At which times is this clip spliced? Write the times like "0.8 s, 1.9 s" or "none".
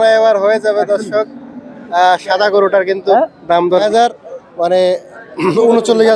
3.8 s